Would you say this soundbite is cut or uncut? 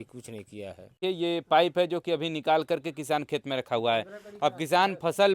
cut